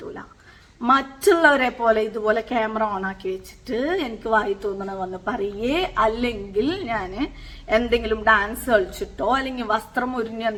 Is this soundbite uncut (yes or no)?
yes